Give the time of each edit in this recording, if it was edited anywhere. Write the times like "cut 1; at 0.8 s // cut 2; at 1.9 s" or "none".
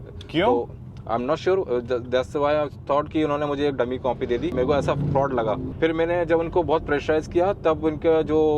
cut 1; at 4.5 s // cut 2; at 5.7 s